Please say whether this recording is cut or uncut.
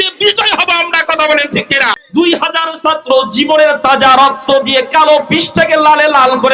cut